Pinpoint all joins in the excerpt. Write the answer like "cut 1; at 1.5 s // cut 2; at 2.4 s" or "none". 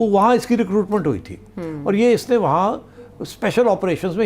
none